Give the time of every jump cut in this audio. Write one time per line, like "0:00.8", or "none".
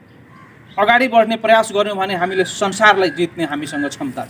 none